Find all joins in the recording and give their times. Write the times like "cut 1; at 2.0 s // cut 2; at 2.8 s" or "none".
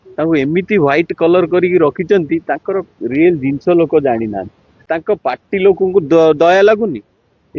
cut 1; at 4.7 s